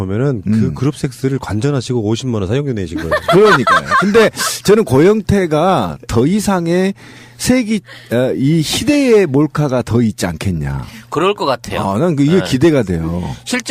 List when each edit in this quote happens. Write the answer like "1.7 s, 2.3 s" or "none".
7.3 s